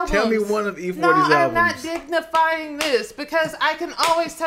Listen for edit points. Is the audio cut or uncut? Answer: uncut